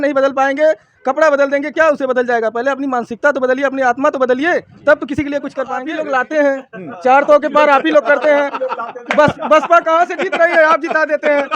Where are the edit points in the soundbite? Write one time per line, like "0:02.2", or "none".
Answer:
0:05.8